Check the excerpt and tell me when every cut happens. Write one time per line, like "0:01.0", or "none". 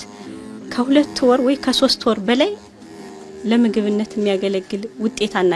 none

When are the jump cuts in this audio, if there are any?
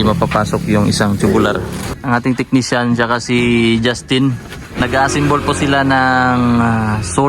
0:01.9
0:04.8

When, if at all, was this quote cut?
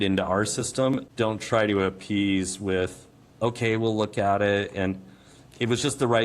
0:01.1

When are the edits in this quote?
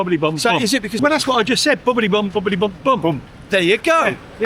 0:01.0

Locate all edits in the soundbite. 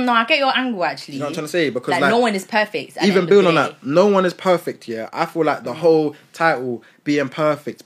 none

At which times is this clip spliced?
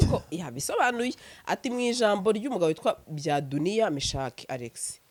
none

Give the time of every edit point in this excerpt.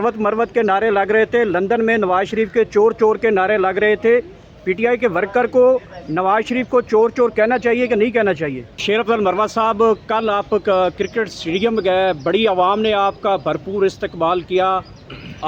0:08.8

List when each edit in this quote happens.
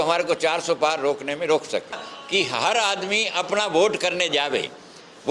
0:02.0

